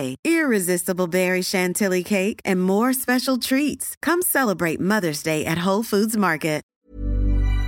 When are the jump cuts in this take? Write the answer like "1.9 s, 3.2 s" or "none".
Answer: 6.7 s